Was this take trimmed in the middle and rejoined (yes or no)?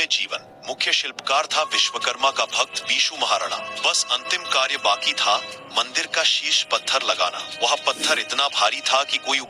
yes